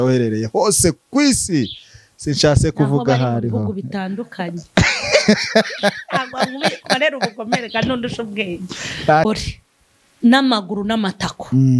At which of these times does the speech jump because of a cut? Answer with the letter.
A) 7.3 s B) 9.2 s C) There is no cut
B